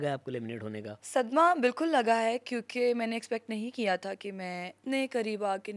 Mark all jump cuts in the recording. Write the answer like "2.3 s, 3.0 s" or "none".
0.9 s, 4.8 s